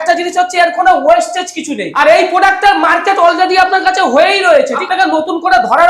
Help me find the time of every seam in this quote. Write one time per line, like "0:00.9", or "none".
0:01.9
0:04.8